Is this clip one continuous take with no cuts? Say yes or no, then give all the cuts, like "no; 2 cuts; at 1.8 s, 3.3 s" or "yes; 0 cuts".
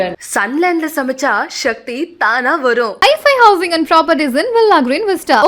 yes; 0 cuts